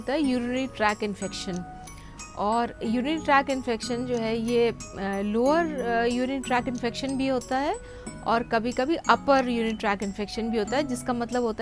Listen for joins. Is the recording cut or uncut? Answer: uncut